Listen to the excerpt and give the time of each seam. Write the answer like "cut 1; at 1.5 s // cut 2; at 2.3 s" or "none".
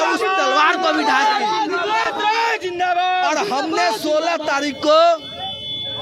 none